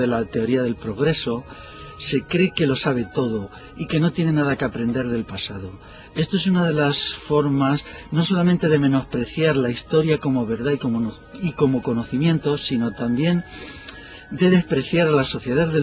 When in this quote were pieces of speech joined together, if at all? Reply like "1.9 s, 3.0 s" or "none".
10.3 s